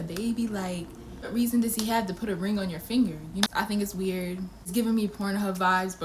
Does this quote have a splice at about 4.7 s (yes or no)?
yes